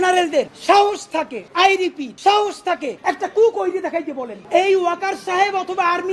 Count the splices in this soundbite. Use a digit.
1